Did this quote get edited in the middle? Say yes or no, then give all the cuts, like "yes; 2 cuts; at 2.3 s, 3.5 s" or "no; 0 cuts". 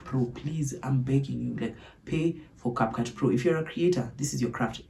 no; 0 cuts